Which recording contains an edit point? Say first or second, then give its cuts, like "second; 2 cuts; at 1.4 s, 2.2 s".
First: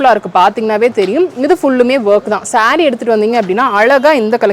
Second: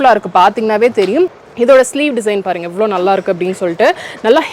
second; 1 cut; at 1.4 s